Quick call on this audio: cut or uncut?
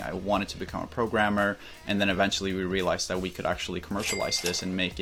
uncut